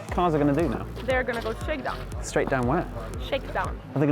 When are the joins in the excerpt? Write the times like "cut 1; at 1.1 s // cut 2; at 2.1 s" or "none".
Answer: cut 1; at 0.9 s // cut 2; at 2.1 s

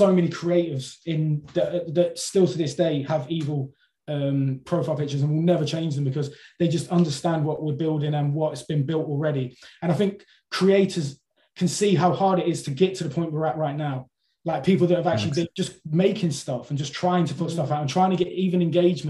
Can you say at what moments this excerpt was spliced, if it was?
cut 1; at 15.5 s

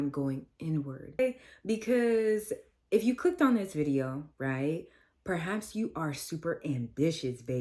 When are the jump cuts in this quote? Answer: cut 1; at 1.2 s

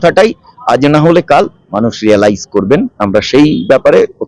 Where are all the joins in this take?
none

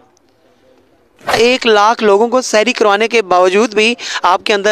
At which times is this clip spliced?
cut 1; at 1.3 s

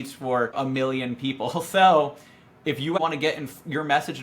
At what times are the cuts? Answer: cut 1; at 3.0 s

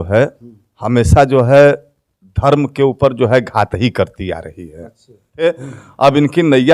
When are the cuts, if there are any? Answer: cut 1; at 5.4 s

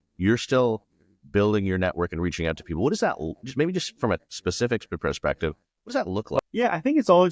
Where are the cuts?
cut 1; at 6.4 s

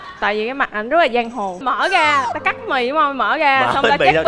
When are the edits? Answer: cut 1; at 1.6 s

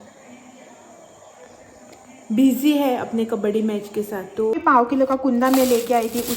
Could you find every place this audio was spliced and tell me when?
cut 1; at 4.5 s

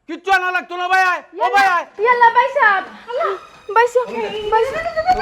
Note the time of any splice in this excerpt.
none

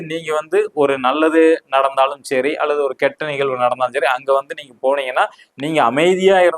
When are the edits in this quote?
none

